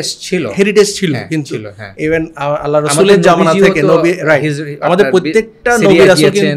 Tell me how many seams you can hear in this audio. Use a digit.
0